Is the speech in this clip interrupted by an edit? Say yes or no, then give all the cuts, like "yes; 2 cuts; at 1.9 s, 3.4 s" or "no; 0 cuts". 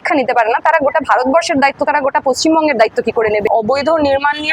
yes; 1 cut; at 3.5 s